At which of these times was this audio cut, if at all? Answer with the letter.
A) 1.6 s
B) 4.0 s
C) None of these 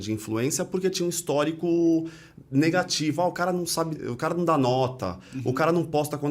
B